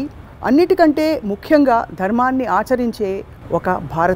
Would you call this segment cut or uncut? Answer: uncut